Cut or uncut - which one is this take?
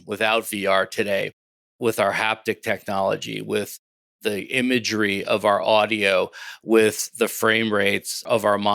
uncut